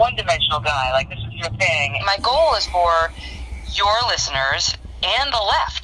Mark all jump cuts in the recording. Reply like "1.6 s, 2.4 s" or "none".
2.0 s